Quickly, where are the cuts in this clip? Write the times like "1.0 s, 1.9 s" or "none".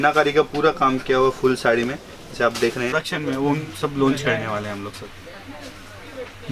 3.0 s